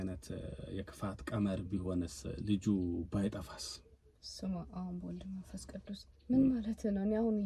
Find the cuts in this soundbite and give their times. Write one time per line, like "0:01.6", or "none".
none